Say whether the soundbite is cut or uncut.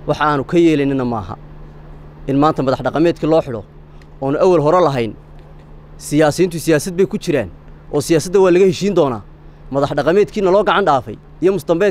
uncut